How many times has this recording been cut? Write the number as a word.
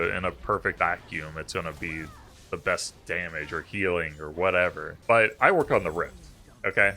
two